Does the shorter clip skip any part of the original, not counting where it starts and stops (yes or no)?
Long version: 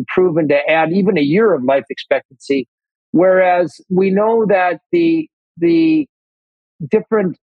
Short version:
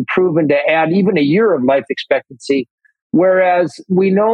no